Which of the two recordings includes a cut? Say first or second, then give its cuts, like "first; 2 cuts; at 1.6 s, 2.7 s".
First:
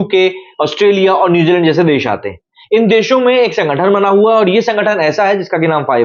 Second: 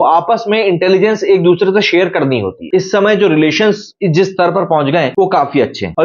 second; 1 cut; at 2.7 s